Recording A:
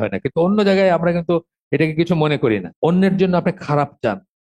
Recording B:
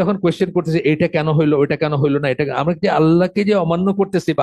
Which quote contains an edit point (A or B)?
A